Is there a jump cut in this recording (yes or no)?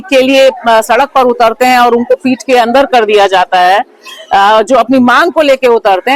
no